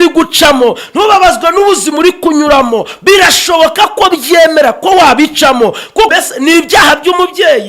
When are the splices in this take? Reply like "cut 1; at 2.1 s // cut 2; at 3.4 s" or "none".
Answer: cut 1; at 6.1 s

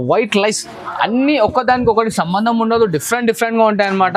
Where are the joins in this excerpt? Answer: none

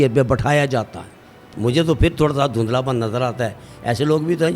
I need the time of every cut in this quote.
cut 1; at 1.5 s

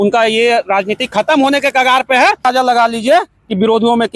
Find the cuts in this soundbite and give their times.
cut 1; at 2.5 s

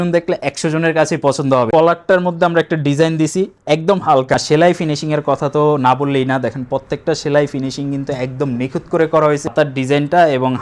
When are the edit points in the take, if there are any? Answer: cut 1; at 1.7 s // cut 2; at 4.3 s // cut 3; at 9.5 s

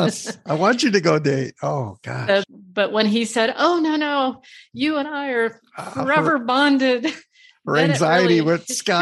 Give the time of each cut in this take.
cut 1; at 2.4 s

